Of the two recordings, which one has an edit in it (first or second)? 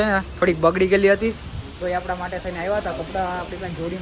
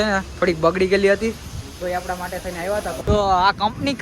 second